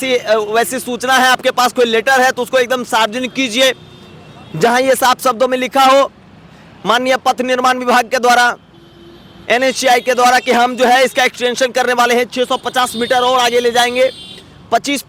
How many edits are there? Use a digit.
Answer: 0